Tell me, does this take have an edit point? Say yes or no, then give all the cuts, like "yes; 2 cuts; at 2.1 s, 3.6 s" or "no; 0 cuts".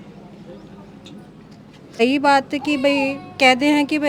yes; 1 cut; at 2.0 s